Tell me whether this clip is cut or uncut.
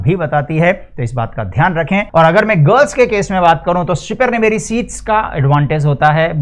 cut